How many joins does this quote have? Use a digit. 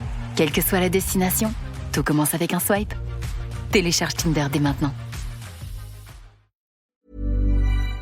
1